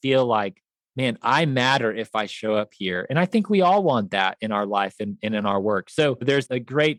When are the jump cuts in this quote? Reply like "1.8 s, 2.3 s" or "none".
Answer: none